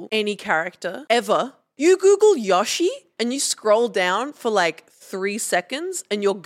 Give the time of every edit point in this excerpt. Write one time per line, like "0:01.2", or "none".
0:01.0
0:01.7
0:03.1